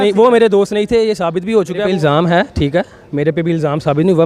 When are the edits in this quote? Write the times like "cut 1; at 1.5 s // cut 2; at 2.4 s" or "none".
cut 1; at 1.8 s